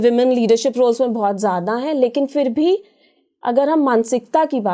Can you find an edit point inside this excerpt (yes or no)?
no